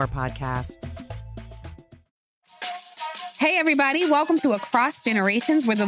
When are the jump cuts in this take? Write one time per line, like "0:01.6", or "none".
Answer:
0:02.0